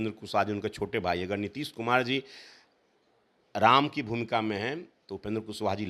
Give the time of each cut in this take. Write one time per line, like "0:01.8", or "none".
none